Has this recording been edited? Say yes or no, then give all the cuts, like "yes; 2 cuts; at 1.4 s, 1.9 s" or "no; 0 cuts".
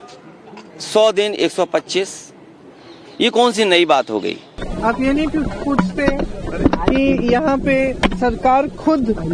no; 0 cuts